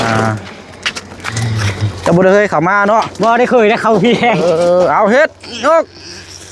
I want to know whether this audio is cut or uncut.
uncut